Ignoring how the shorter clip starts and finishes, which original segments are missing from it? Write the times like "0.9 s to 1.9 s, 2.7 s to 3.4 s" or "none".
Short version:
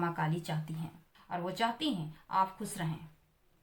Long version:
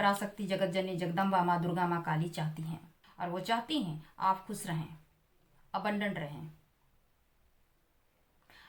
none